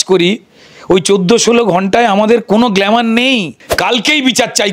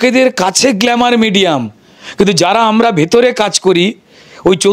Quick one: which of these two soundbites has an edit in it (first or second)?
first